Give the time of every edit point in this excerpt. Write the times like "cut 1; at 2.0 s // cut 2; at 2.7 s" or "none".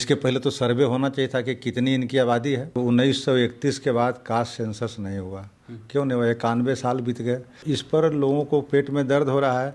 cut 1; at 2.8 s // cut 2; at 7.5 s